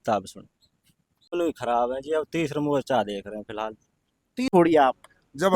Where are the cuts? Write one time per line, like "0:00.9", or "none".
0:01.3
0:04.4